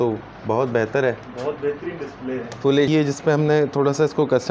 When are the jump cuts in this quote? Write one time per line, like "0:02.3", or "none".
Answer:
0:02.9